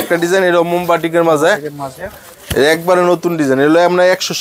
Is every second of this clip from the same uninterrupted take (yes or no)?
yes